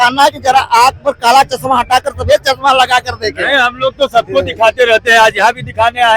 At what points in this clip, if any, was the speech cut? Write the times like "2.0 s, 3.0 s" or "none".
none